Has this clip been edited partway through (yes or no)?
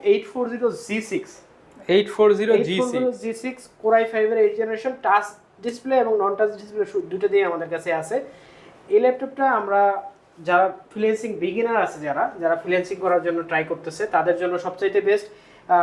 no